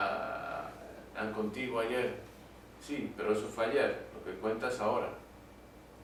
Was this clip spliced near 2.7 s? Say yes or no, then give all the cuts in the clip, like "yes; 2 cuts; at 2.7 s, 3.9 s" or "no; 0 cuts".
no; 0 cuts